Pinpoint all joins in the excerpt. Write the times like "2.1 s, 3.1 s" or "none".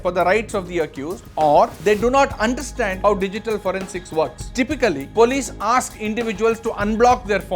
4.4 s